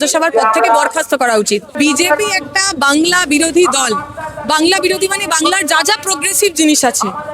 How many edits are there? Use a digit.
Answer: 1